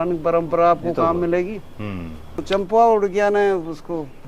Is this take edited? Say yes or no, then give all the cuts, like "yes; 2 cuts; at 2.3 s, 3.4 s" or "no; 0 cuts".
yes; 1 cut; at 2.3 s